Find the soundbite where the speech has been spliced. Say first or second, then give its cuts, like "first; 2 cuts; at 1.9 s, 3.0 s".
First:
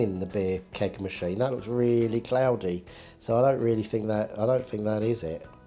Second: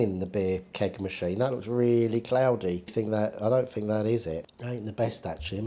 second; 2 cuts; at 2.9 s, 4.5 s